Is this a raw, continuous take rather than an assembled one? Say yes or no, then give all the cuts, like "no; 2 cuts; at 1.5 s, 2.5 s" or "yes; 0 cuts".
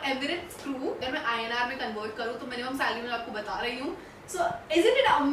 no; 1 cut; at 1.0 s